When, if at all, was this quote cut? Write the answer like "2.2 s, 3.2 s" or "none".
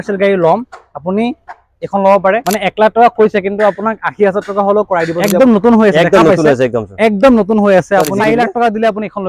2.5 s, 5.2 s, 8.1 s